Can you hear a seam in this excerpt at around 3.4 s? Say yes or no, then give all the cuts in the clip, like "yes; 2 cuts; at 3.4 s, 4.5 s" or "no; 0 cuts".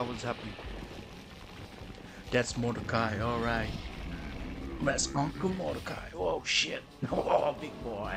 no; 0 cuts